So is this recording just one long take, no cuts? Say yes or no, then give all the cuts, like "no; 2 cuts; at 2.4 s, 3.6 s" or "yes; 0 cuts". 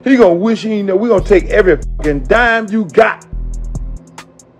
no; 1 cut; at 3.1 s